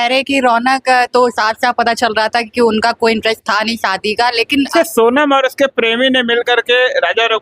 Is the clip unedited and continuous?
no; 1 cut; at 4.7 s

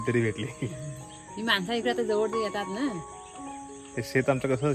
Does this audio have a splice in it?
no; 0 cuts

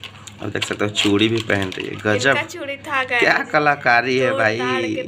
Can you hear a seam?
no; 0 cuts

